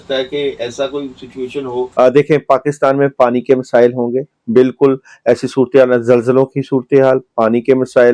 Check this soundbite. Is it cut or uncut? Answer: cut